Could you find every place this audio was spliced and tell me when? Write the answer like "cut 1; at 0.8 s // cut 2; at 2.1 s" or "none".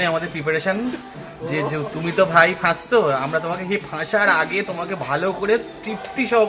none